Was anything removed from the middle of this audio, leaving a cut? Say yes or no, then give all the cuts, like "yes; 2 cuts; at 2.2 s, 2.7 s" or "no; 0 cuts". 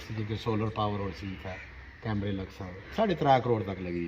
yes; 1 cut; at 2.8 s